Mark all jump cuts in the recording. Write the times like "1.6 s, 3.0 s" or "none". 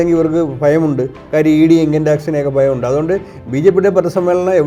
none